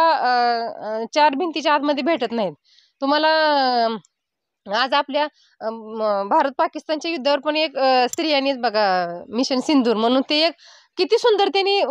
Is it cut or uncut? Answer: uncut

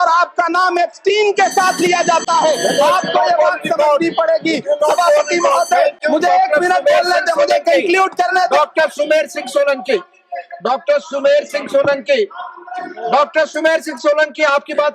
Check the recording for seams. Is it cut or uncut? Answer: uncut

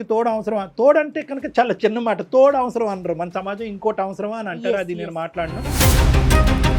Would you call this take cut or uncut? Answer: uncut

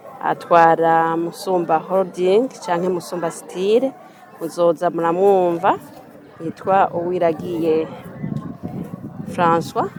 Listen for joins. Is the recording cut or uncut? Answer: uncut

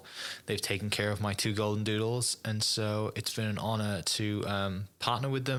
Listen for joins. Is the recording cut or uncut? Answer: uncut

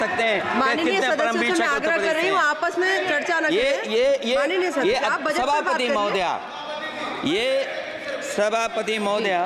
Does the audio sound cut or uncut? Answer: uncut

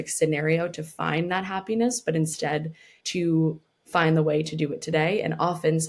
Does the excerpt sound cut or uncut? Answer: uncut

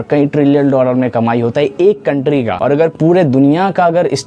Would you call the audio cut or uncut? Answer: cut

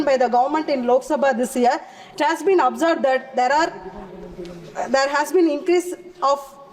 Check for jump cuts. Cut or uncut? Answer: uncut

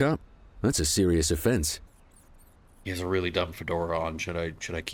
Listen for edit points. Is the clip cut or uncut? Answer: uncut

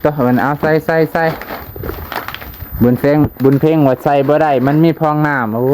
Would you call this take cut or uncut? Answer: uncut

